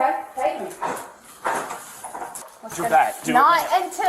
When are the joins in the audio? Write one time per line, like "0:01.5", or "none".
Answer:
0:02.7